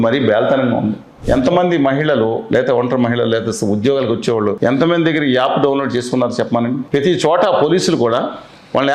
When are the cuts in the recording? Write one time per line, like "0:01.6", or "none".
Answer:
0:01.1
0:04.6
0:06.8